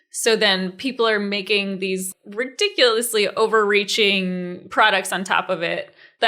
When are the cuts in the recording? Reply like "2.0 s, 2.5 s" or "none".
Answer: 2.1 s